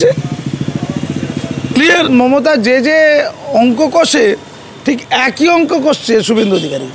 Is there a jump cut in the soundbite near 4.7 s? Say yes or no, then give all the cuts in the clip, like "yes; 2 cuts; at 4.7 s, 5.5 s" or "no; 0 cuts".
no; 1 cut; at 1.9 s